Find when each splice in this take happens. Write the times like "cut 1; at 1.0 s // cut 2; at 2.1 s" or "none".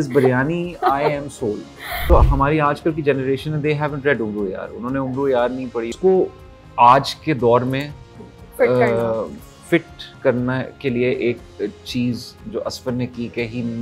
cut 1; at 2.1 s // cut 2; at 5.9 s